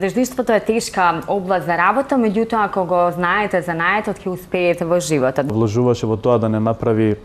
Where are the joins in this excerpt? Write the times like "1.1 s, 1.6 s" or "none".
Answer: 5.5 s

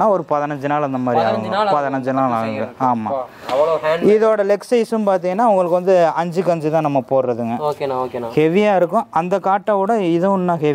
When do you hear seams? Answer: none

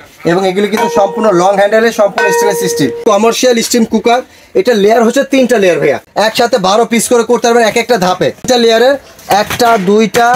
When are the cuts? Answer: 3.0 s, 6.1 s, 8.5 s

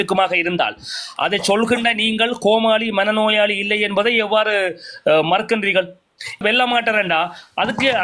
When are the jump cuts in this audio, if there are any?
6.4 s

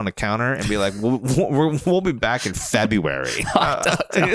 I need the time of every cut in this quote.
none

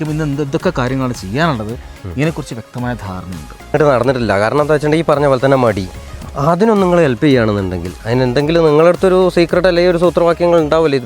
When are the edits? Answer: 3.7 s

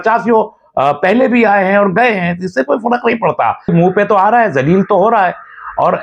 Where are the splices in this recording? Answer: 3.7 s

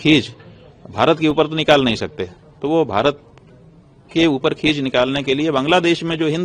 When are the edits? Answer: none

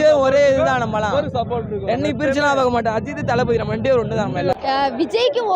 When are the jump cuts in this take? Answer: 4.5 s

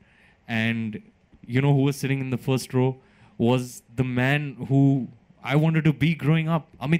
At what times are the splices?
none

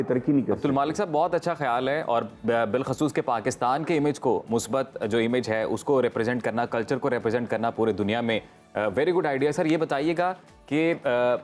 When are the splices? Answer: none

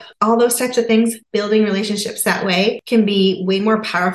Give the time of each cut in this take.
1.2 s, 2.8 s

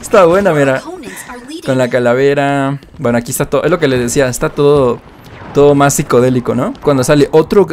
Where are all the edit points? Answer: none

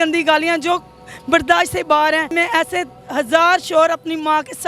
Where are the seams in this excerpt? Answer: 2.3 s

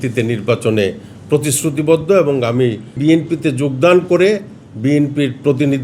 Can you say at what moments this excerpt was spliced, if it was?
3.0 s

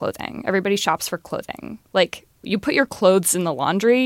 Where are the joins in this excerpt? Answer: none

